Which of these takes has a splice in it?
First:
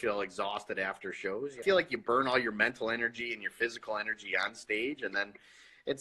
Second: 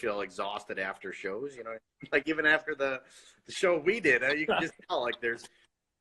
first; 1 cut; at 1.6 s

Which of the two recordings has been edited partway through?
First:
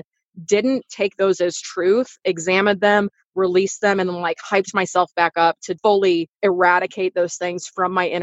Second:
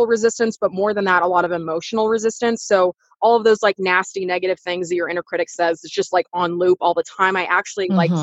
first; 2 cuts; at 5.7 s, 6.3 s

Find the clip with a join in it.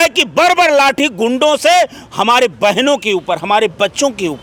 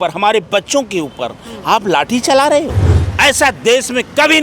second; 1 cut; at 2.8 s

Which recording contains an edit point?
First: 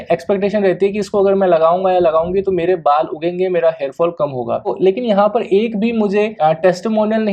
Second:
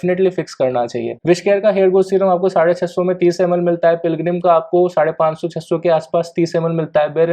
second; 1 cut; at 1.2 s

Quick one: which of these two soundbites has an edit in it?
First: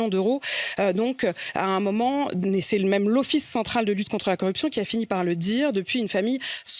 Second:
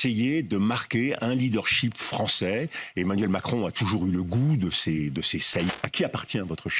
second; 1 cut; at 5.7 s

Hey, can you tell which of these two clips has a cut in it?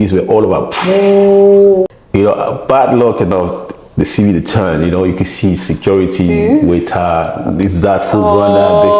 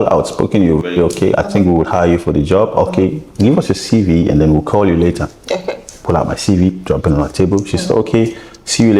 first; 1 cut; at 1.9 s

